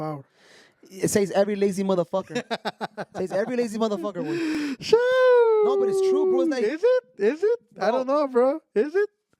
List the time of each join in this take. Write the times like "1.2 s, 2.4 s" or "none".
none